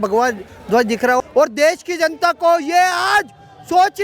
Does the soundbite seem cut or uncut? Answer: cut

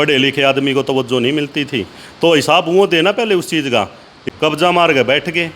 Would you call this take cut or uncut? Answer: cut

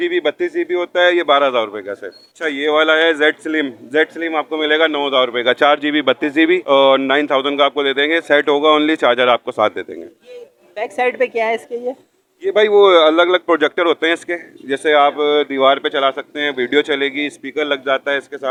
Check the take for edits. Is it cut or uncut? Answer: uncut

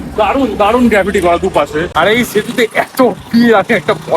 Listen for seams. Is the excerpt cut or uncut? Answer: cut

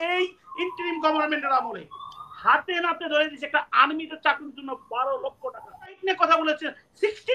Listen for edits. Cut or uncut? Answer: cut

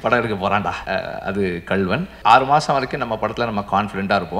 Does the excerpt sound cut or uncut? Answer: cut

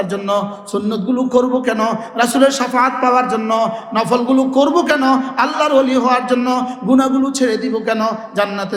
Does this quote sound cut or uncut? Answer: uncut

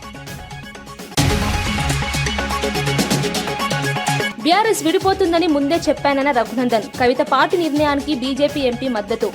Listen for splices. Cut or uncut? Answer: uncut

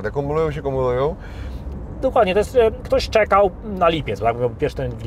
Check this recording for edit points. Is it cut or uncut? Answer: uncut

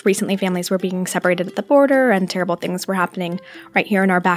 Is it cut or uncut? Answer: uncut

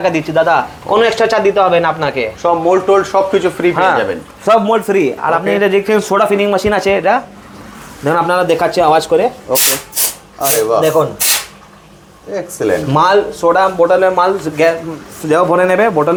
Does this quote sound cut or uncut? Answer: uncut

